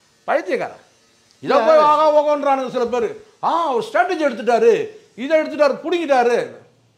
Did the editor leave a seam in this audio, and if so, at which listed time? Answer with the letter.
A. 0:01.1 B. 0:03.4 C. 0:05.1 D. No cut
D